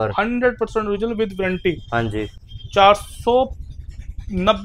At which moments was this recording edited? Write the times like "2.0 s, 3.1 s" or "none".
none